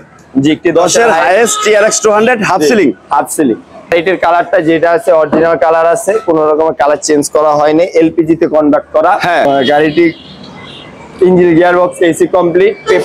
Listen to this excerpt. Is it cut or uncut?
cut